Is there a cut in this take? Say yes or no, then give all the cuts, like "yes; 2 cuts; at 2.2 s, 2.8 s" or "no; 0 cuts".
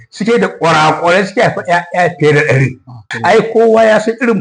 yes; 1 cut; at 3.1 s